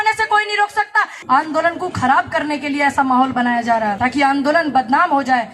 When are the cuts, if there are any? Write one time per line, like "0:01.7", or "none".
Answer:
0:01.2
0:04.0